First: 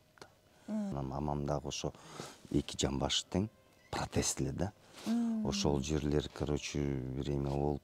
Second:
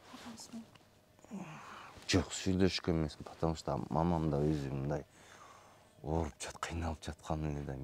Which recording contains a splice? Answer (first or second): first